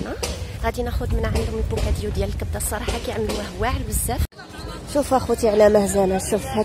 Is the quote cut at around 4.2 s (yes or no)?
yes